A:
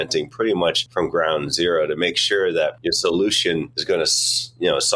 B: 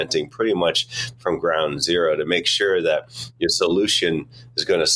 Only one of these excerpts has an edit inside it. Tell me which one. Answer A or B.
A